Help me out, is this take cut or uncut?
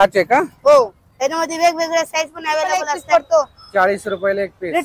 cut